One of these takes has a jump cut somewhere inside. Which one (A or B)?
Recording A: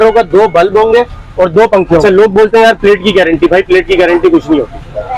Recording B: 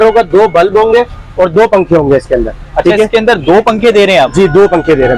A